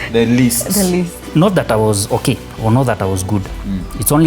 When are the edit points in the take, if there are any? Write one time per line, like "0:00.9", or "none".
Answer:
0:01.2